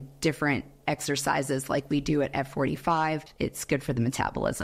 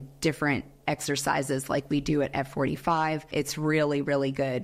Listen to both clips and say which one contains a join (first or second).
first